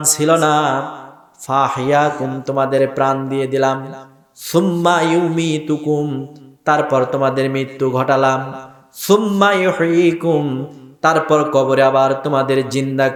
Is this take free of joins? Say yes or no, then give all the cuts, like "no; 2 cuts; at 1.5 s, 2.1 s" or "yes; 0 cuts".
yes; 0 cuts